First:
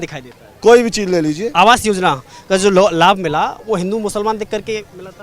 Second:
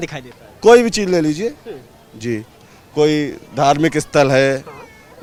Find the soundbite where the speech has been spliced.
first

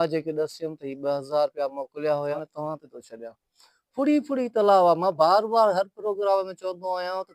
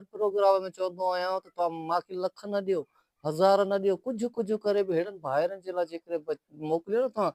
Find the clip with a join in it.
first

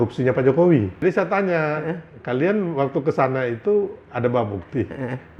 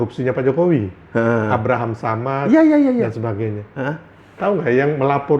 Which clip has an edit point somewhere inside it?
first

